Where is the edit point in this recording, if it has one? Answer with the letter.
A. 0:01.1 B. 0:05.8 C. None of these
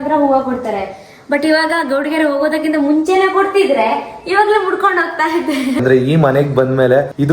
B